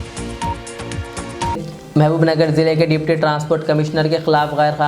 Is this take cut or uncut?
uncut